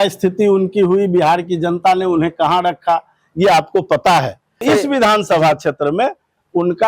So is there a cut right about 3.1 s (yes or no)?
no